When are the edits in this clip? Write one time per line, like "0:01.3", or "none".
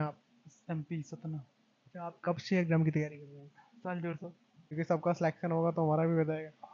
0:04.6